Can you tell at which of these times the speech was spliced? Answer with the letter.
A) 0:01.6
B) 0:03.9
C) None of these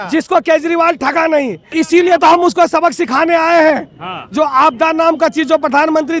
A